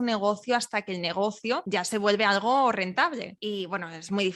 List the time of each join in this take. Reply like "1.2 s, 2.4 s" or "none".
1.6 s, 3.3 s